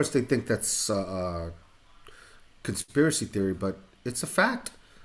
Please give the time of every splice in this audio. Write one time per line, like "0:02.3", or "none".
none